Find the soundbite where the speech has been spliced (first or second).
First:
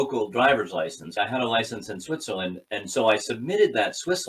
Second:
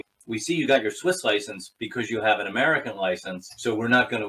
first